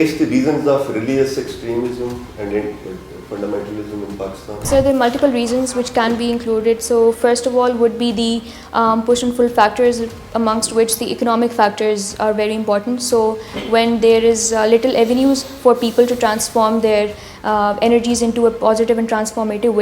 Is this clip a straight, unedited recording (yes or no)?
no